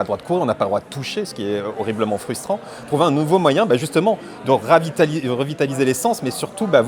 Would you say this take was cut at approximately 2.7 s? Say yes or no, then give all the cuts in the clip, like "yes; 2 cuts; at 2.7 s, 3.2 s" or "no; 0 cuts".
no; 0 cuts